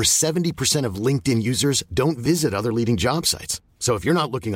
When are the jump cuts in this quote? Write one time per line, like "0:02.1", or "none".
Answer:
none